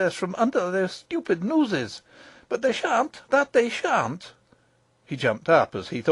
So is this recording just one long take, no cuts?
yes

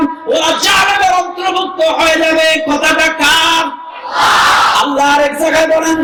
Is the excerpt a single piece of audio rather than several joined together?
yes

